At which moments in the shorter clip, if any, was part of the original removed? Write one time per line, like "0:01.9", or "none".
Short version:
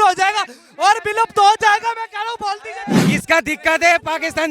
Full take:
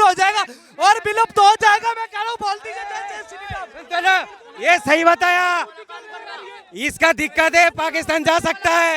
0:03.0